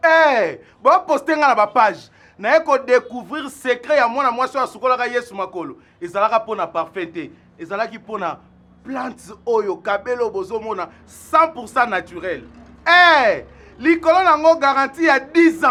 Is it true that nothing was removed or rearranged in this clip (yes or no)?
yes